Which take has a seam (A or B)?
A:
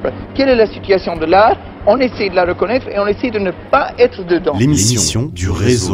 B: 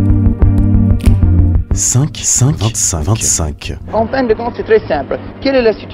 B